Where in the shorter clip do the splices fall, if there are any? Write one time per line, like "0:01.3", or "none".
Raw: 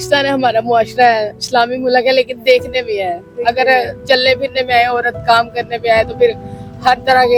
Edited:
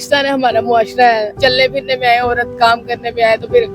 0:01.3